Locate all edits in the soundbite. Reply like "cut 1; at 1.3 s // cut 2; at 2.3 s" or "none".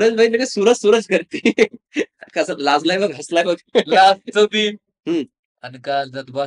none